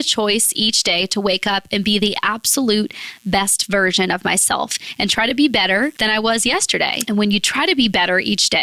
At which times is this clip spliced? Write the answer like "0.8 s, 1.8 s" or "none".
6.0 s, 7.0 s